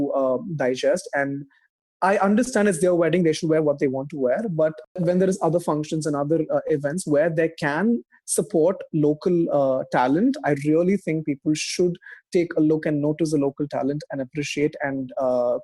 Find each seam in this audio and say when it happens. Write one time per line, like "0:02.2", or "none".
0:04.9